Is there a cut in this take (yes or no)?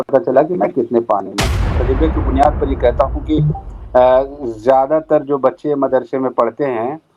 yes